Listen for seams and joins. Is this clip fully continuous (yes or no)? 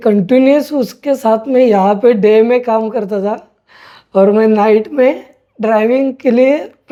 yes